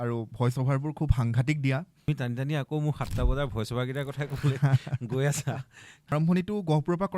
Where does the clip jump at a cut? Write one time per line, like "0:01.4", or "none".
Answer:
0:02.1
0:06.1